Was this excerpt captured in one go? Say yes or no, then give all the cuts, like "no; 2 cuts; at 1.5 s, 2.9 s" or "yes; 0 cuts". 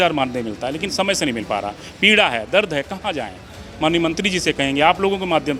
yes; 0 cuts